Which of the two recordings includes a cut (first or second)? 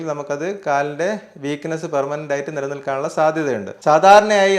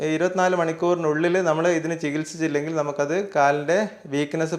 first